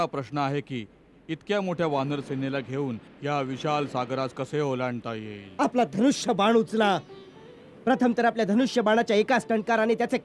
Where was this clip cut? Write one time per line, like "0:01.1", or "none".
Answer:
0:05.4